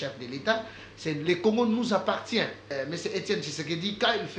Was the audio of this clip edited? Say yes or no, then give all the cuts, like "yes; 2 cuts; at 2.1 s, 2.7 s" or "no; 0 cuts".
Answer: yes; 1 cut; at 2.6 s